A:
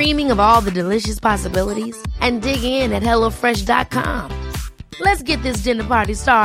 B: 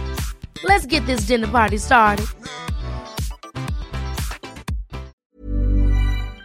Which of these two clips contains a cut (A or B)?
B